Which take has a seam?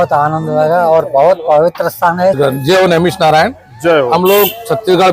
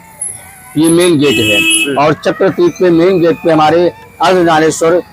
first; 1 cut; at 2.4 s

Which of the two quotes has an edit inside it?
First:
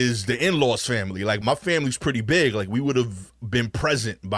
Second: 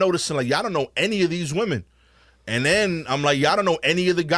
first; 1 cut; at 1.4 s

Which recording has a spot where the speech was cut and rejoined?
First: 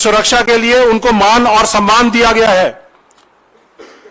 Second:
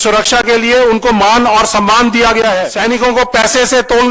second; 1 cut; at 2.7 s

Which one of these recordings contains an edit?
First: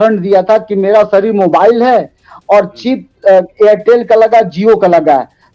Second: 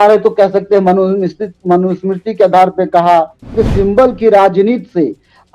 second; 1 cut; at 3.5 s

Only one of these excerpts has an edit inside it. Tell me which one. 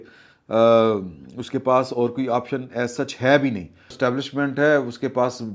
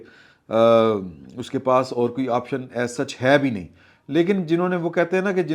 first; 1 cut; at 3.9 s

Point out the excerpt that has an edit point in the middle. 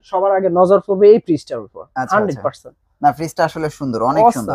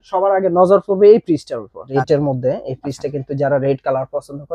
second; 1 cut; at 1.9 s

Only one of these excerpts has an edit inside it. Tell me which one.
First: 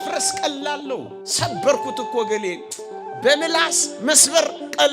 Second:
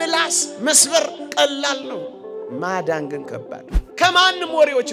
second; 1 cut; at 3.7 s

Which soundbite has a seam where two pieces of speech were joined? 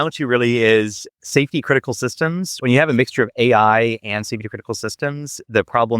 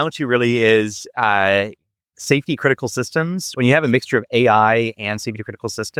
first; 1 cut; at 1.0 s

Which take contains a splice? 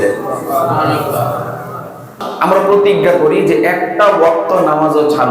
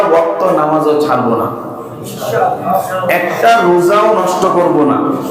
first; 1 cut; at 2.2 s

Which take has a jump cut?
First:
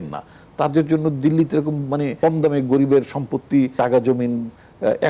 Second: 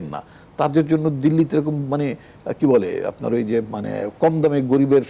first; 2 cuts; at 2.1 s, 3.7 s

